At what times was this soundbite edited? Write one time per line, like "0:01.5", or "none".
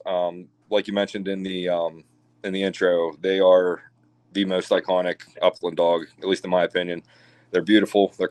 none